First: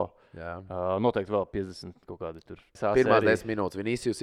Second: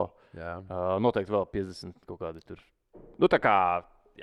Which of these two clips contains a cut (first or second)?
first